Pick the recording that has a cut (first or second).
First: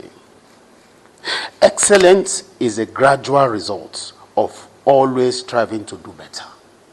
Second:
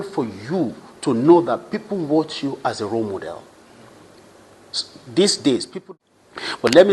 second